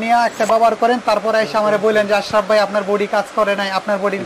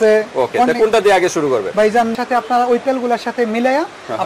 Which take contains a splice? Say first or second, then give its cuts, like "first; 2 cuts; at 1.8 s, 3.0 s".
second; 1 cut; at 2.1 s